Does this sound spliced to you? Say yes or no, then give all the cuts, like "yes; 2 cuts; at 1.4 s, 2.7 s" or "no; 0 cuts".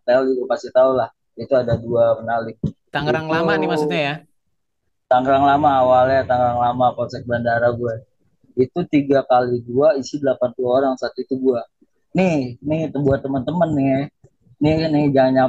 no; 0 cuts